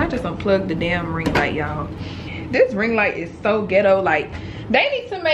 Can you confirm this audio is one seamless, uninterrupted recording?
no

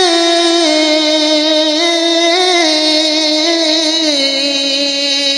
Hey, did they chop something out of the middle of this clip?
no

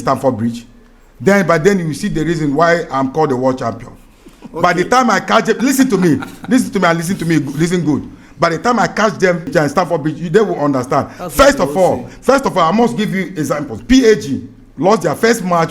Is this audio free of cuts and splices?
no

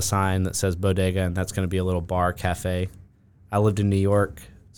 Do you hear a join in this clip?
no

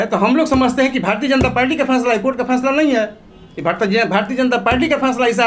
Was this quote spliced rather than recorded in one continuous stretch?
no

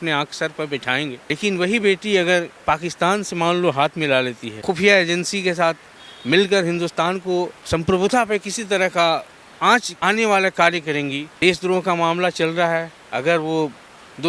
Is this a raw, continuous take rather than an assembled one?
no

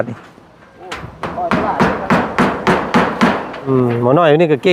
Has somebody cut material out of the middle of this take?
yes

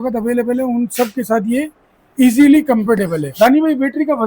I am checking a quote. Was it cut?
yes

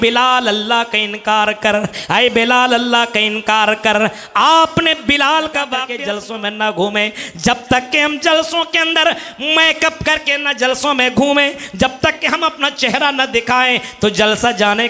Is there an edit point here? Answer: yes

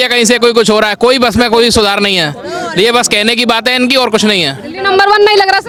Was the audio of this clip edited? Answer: no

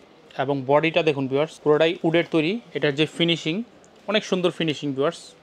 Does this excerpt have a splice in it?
yes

